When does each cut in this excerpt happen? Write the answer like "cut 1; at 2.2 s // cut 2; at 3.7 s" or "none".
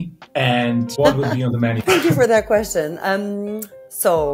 cut 1; at 0.9 s // cut 2; at 1.8 s